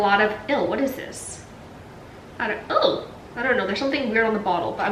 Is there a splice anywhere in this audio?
no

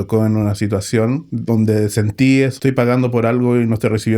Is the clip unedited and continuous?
no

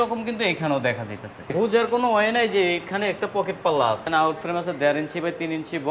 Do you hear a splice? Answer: yes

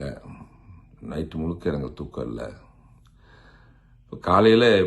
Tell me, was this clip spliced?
no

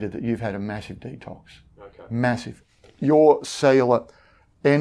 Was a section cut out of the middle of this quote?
yes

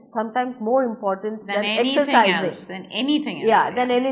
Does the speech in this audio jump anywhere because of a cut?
no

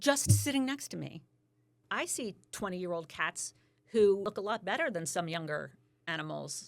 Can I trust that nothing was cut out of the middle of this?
no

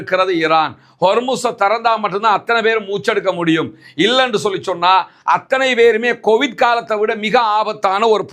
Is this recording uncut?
yes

